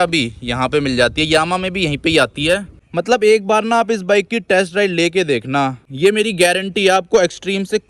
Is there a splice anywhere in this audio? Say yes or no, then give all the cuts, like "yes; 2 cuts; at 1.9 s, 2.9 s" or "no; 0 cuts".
yes; 2 cuts; at 2.8 s, 5.8 s